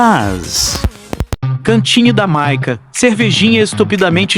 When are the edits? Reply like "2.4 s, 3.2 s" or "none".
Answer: 1.3 s